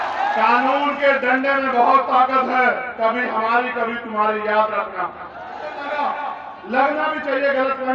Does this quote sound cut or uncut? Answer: cut